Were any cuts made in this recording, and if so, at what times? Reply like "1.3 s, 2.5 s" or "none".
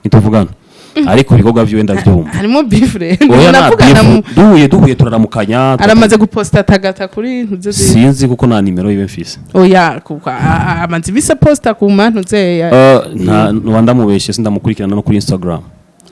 none